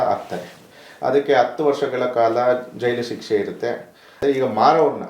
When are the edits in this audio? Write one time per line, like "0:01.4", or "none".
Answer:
0:04.1